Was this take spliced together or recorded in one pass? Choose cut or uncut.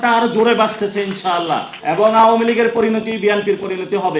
cut